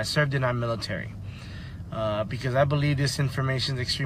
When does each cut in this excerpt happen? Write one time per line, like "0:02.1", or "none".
none